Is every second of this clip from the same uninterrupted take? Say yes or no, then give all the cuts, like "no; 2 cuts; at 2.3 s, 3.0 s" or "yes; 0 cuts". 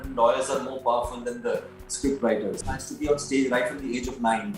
no; 1 cut; at 2.6 s